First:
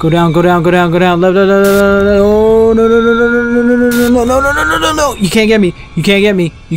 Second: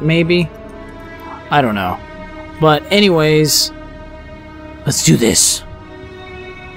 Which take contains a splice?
second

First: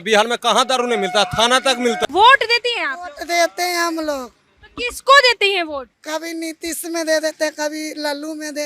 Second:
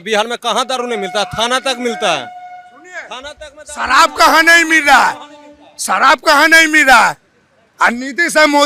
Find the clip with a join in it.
first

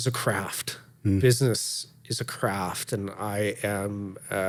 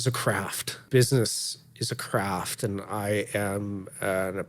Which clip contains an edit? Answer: second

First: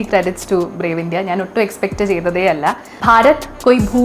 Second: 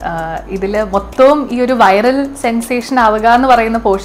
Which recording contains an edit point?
first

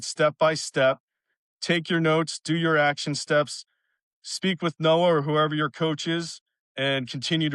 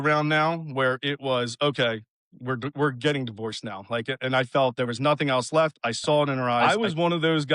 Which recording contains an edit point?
second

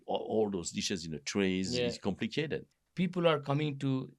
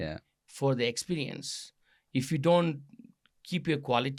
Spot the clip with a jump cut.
first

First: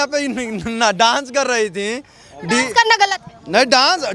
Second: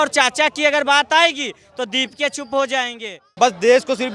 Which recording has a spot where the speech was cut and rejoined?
second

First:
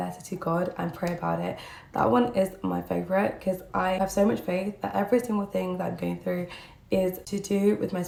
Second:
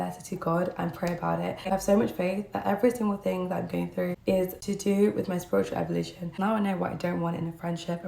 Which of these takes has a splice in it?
second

